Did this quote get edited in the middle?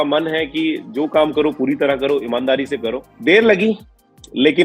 no; 0 cuts

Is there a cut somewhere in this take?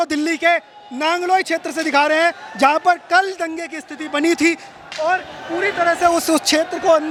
no; 0 cuts

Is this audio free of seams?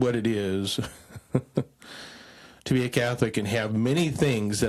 yes; 0 cuts

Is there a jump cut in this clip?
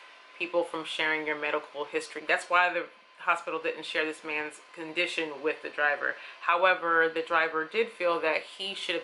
yes; 1 cut; at 2.2 s

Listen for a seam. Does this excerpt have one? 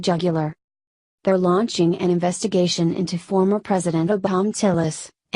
no; 0 cuts

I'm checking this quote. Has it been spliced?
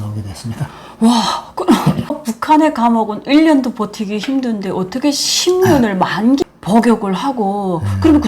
yes; 2 cuts; at 2.1 s, 6.4 s

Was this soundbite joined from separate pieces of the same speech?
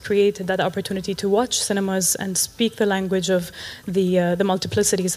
no; 0 cuts

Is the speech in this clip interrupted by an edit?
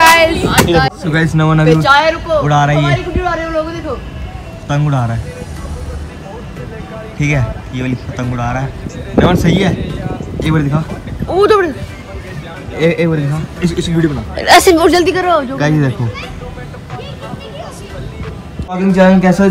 yes; 4 cuts; at 1.0 s, 4.6 s, 11.1 s, 18.7 s

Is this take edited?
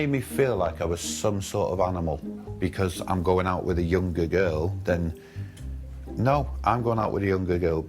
no; 0 cuts

